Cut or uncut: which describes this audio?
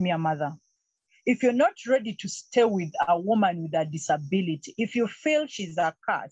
uncut